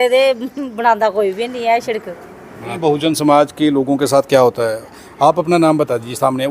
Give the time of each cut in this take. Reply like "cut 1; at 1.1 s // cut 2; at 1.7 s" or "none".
cut 1; at 2.8 s